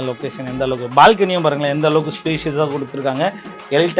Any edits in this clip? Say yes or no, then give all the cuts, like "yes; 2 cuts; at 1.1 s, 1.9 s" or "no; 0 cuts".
no; 0 cuts